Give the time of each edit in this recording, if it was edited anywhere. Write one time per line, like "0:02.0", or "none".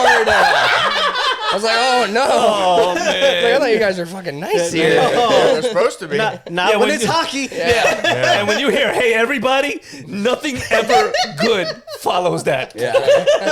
none